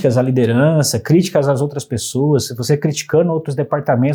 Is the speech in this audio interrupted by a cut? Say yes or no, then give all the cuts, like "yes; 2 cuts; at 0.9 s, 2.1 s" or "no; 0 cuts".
no; 0 cuts